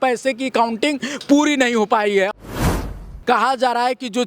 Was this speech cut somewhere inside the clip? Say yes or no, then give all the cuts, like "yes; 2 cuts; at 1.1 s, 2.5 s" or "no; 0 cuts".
yes; 1 cut; at 2.9 s